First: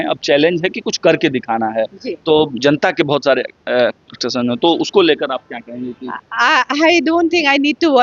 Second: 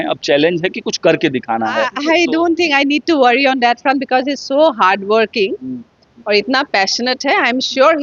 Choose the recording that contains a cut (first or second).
second